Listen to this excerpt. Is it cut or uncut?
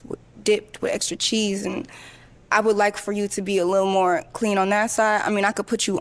uncut